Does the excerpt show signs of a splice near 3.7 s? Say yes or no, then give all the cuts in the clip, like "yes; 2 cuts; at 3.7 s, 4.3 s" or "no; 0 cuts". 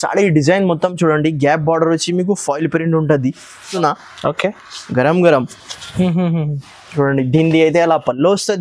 yes; 1 cut; at 3.7 s